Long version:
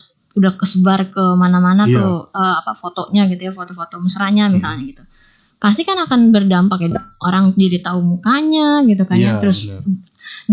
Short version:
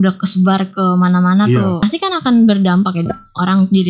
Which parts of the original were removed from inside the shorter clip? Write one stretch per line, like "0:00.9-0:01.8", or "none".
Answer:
0:02.2-0:05.7